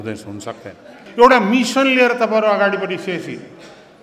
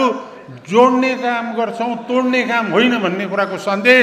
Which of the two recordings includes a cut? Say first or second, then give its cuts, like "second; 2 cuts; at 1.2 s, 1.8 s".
first; 1 cut; at 1.0 s